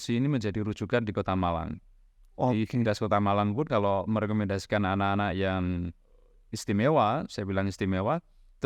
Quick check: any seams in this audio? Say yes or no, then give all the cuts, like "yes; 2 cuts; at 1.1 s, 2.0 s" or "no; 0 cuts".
no; 0 cuts